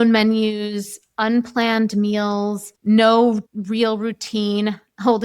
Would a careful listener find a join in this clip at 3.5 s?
yes; 2 cuts; at 2.7 s, 3.5 s

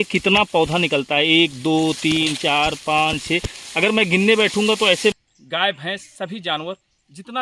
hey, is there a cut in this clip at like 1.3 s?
no; 1 cut; at 5.1 s

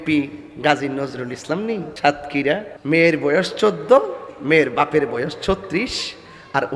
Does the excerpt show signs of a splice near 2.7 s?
yes; 2 cuts; at 1.9 s, 2.7 s

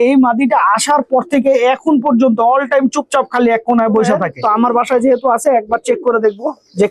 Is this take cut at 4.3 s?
yes; 1 cut; at 4.3 s

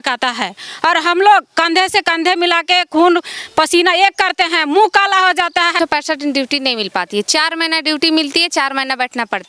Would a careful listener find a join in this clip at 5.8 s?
yes; 1 cut; at 5.8 s

